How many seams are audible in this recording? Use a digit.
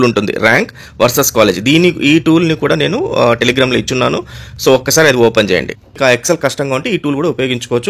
1